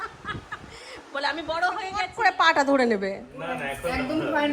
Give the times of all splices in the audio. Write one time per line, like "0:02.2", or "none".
0:02.0